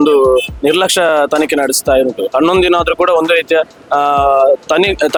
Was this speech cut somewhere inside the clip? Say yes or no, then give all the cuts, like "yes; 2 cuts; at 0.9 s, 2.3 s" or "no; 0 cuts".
no; 0 cuts